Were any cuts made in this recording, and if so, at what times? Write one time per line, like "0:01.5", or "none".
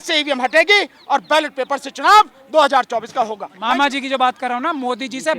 0:03.5